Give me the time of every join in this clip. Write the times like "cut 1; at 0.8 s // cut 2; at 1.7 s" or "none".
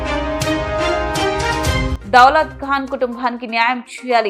cut 1; at 1.9 s